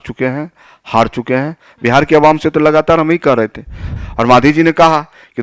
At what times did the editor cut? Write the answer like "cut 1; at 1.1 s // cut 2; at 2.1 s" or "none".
cut 1; at 3.9 s